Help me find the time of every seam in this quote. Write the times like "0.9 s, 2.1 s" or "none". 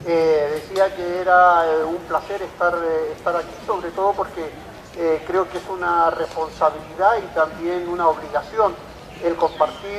none